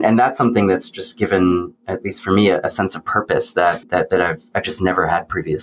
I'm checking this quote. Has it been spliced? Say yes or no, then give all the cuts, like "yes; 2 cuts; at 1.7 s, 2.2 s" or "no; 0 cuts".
no; 0 cuts